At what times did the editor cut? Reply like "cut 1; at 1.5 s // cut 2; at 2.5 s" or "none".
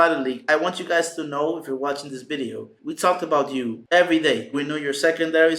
cut 1; at 2.7 s // cut 2; at 3.8 s // cut 3; at 4.5 s